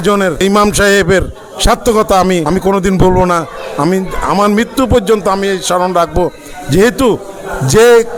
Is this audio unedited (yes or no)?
yes